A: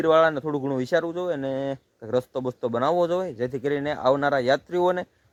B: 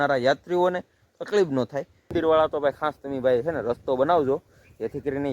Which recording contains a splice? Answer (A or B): B